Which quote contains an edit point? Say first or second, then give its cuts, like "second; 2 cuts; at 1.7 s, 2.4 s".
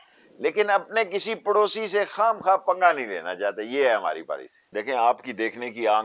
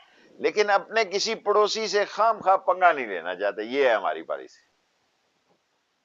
first; 1 cut; at 4.6 s